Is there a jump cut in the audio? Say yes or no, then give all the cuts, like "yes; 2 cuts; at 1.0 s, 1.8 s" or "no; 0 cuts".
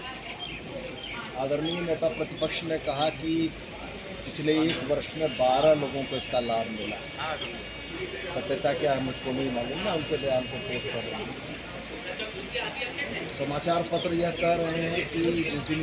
no; 0 cuts